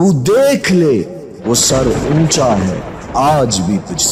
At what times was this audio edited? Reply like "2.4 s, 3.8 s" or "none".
none